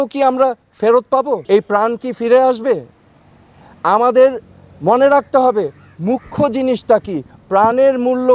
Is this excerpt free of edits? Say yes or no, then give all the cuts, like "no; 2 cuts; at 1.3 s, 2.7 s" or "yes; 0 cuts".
yes; 0 cuts